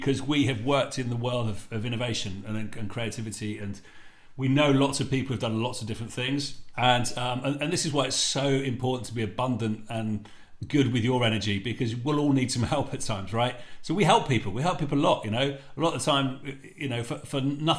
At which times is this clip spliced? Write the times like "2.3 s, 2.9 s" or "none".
6.6 s